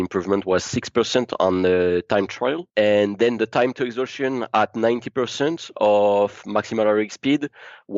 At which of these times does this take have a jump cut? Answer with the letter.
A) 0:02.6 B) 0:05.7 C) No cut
A